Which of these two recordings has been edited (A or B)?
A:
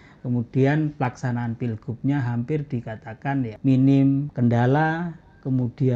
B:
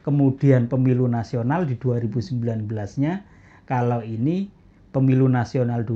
A